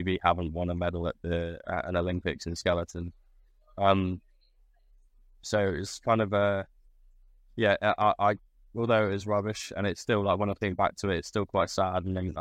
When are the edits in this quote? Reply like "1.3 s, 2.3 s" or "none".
none